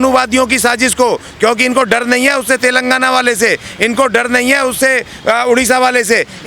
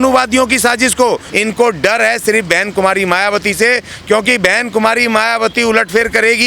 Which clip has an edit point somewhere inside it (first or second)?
second